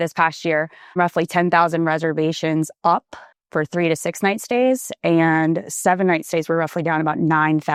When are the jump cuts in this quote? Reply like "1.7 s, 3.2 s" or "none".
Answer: none